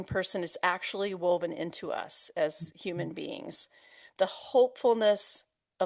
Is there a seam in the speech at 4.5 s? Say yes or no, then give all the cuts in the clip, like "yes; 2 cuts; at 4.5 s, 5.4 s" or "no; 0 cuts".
no; 0 cuts